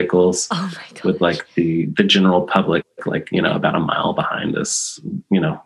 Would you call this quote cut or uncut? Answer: uncut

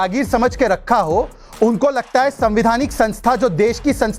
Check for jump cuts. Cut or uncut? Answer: uncut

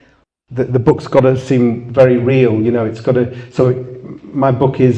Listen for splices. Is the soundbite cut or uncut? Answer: uncut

